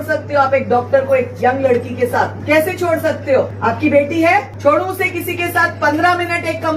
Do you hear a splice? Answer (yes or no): yes